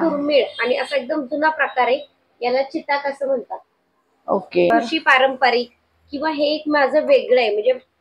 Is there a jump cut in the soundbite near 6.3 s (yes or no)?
no